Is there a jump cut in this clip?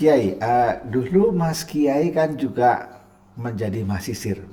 no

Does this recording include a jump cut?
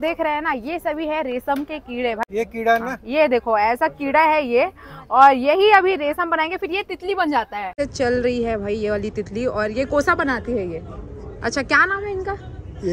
yes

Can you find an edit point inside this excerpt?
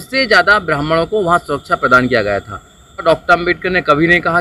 yes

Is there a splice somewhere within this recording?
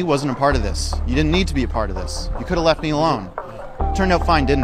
no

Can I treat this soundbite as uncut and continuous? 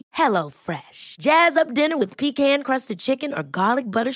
yes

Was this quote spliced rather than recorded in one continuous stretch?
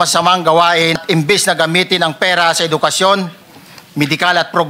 yes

